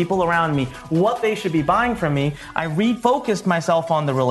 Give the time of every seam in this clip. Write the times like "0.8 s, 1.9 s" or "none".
3.0 s